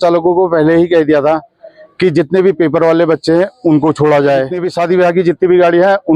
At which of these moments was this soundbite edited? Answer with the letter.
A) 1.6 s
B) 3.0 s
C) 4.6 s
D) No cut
C